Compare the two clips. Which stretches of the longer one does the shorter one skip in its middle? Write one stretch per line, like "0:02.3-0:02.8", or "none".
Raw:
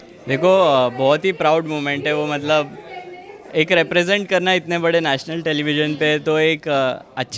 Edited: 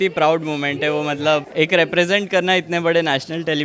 0:02.7-0:03.5